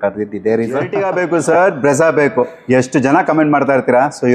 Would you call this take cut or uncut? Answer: cut